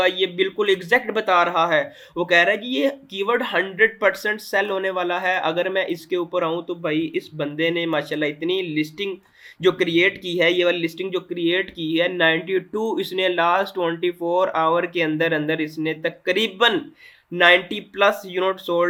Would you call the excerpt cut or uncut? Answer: uncut